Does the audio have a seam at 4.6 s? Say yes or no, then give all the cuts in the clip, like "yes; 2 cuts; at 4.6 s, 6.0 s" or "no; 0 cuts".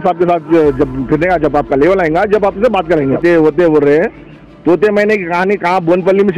no; 1 cut; at 3.2 s